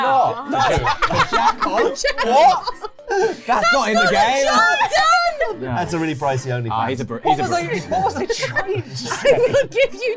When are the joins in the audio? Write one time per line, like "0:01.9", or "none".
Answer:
0:05.5